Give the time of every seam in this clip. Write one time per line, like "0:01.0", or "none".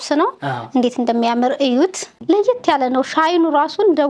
0:02.1